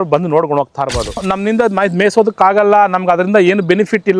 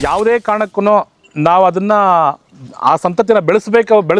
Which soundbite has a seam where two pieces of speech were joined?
first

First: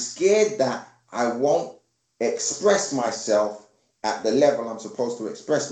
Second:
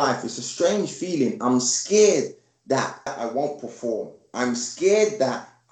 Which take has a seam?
second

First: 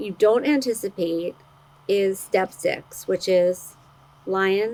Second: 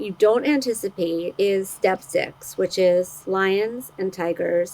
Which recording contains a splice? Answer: second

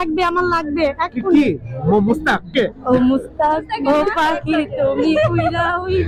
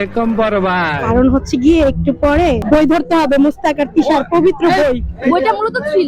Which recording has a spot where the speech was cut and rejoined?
second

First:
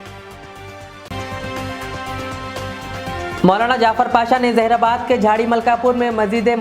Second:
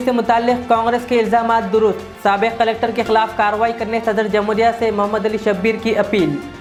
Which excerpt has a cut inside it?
first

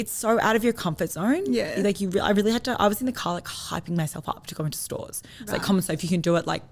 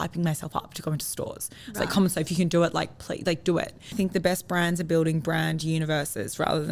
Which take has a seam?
second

